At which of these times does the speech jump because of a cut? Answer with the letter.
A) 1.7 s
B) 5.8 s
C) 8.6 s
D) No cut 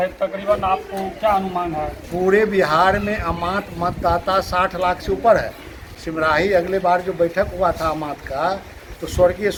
D